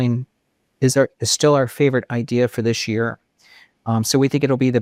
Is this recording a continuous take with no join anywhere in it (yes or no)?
yes